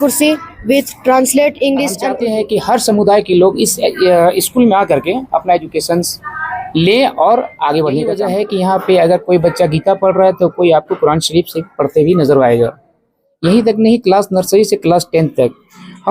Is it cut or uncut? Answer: cut